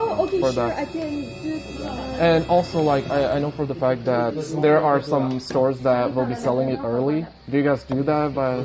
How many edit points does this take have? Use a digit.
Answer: 1